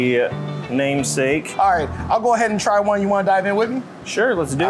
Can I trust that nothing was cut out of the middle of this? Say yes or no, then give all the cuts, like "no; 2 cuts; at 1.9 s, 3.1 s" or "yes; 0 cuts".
no; 1 cut; at 1.7 s